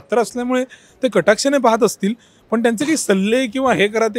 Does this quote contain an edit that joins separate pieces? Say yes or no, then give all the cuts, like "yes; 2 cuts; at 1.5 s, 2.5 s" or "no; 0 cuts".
no; 0 cuts